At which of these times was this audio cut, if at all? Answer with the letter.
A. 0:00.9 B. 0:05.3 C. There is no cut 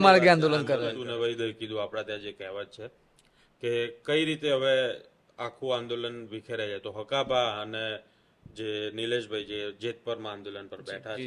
A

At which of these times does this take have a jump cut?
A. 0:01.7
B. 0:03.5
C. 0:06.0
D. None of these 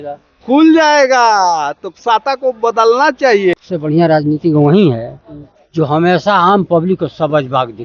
B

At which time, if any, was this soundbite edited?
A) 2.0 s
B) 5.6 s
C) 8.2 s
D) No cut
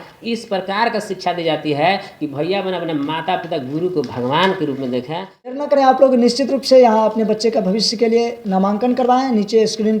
B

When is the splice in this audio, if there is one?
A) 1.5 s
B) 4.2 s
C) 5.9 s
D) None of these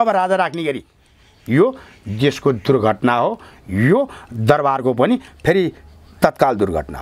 D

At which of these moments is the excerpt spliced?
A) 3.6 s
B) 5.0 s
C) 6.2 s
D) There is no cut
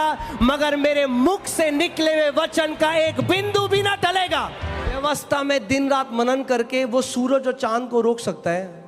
B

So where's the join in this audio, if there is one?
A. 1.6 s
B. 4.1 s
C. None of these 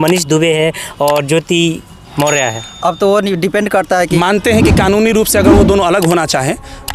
B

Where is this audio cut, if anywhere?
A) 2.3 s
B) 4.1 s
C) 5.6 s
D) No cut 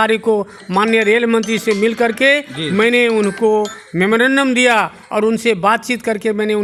D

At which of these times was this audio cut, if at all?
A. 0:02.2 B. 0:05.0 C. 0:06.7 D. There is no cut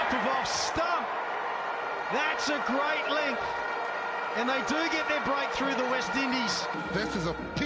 C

